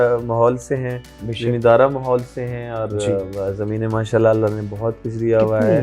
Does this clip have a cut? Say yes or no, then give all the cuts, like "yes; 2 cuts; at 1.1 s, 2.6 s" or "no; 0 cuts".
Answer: no; 0 cuts